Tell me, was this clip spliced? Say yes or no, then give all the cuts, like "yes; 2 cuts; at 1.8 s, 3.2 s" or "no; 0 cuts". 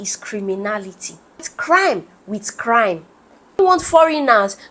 yes; 2 cuts; at 1.5 s, 3.6 s